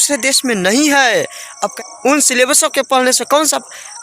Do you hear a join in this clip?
yes; 1 cut; at 1.7 s

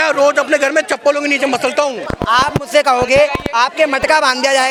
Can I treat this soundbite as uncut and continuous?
yes; 0 cuts

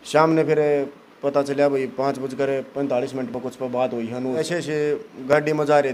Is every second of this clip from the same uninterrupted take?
no; 1 cut; at 4.4 s

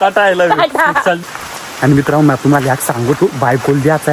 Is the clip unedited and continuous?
no; 1 cut; at 1.6 s

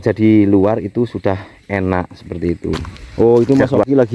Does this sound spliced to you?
yes; 1 cut; at 3.3 s

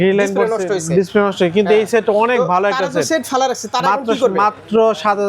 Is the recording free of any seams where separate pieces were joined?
yes; 0 cuts

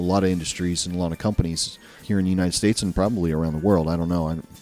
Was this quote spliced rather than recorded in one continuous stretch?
no; 0 cuts

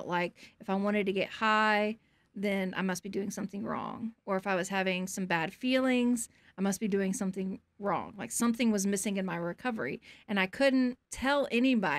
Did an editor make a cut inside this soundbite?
yes; 1 cut; at 11.1 s

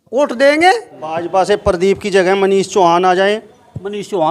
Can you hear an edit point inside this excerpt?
yes; 1 cut; at 1.0 s

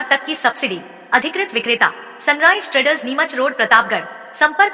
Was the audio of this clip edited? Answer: no; 0 cuts

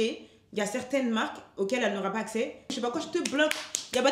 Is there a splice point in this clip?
yes; 1 cut; at 2.8 s

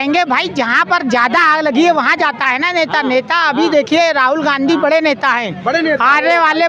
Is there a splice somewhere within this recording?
no; 0 cuts

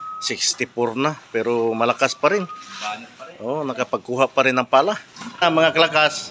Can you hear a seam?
yes; 1 cut; at 5.4 s

